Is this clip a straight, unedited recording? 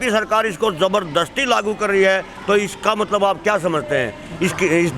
yes; 0 cuts

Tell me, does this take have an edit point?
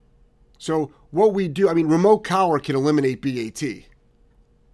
no; 0 cuts

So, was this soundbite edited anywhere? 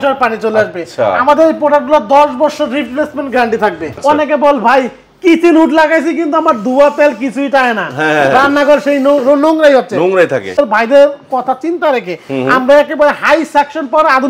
yes; 2 cuts; at 3.9 s, 10.6 s

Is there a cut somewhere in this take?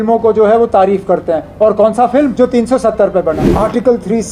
yes; 2 cuts; at 2.3 s, 3.5 s

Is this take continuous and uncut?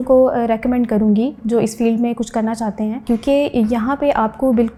yes; 0 cuts

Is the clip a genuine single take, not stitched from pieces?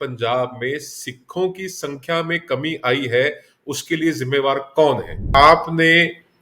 no; 1 cut; at 5.3 s

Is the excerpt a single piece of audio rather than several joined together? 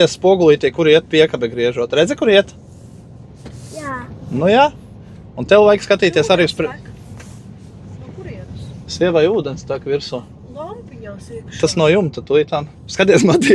yes; 0 cuts

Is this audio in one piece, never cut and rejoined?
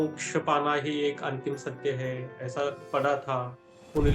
no; 1 cut; at 2.8 s

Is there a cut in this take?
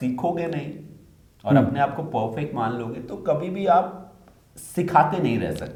no; 0 cuts

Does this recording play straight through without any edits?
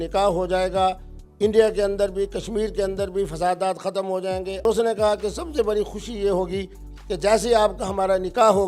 no; 1 cut; at 4.6 s

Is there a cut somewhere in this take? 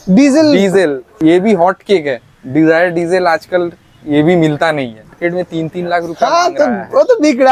yes; 2 cuts; at 1.1 s, 5.0 s

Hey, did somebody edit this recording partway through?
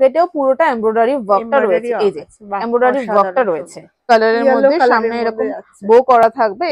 yes; 1 cut; at 4.1 s

